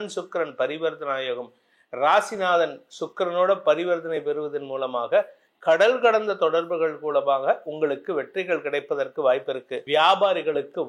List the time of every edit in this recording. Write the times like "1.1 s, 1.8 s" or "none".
9.7 s